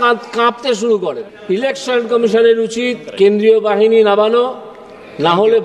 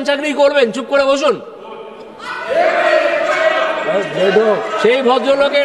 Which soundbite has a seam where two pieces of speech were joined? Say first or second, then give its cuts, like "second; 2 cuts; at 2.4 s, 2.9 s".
first; 1 cut; at 1.3 s